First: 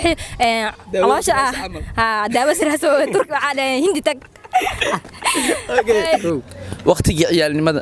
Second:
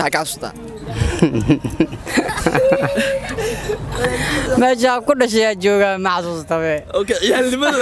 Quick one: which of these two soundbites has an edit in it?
first; 1 cut; at 6.2 s

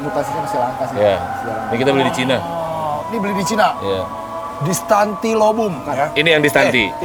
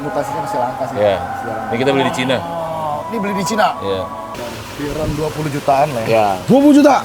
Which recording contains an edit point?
second; 1 cut; at 4.3 s

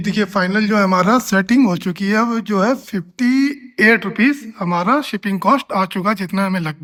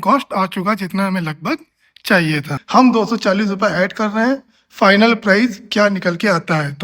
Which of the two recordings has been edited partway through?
second; 1 cut; at 2.5 s

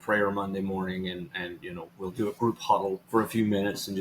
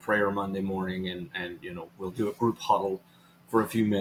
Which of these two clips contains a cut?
first; 1 cut; at 3.0 s

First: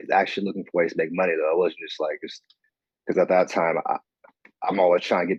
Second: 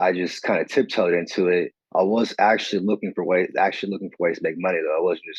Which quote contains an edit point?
second; 1 cut; at 1.8 s

